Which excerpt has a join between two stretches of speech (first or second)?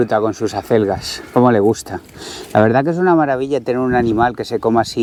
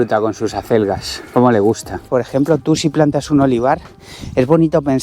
second